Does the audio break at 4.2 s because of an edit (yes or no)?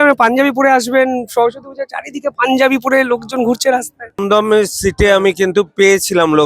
yes